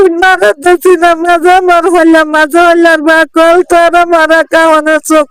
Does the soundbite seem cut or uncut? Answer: uncut